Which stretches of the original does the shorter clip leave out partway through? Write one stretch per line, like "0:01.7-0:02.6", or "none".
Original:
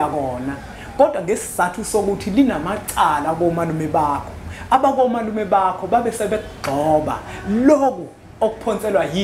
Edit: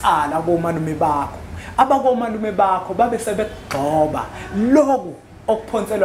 none